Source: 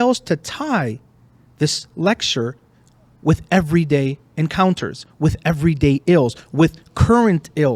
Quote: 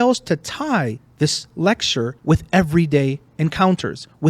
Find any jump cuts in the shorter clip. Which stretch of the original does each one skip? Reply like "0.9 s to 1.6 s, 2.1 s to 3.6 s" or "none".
1.0 s to 1.4 s, 2.6 s to 3.1 s